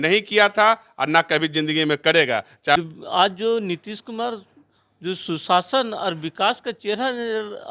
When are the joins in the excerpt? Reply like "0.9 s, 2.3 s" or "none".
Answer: 2.8 s